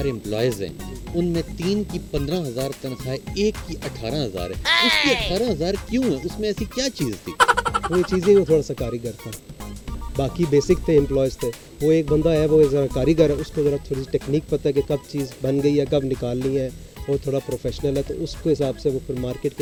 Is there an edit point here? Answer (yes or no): no